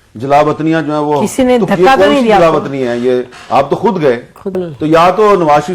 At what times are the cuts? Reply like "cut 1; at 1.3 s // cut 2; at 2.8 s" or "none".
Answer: cut 1; at 4.6 s